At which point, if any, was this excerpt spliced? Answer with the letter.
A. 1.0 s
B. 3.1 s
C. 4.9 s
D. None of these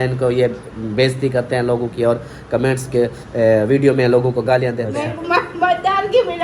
C